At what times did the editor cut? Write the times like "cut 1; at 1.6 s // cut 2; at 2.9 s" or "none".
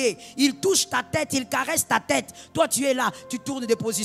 none